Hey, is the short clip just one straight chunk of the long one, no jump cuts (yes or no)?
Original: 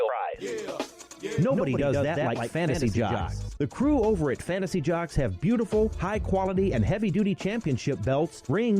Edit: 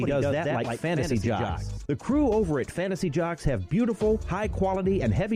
yes